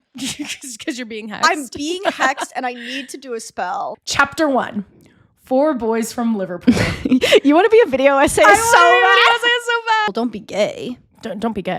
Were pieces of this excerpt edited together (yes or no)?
yes